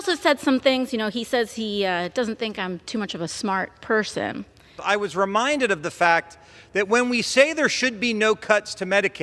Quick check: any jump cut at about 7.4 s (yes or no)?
no